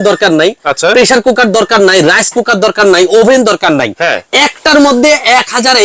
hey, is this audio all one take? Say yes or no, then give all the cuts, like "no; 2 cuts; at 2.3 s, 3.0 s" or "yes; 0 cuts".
yes; 0 cuts